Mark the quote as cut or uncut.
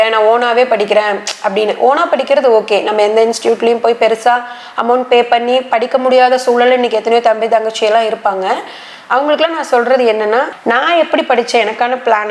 cut